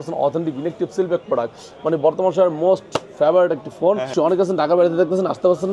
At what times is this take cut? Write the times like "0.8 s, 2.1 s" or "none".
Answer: 4.1 s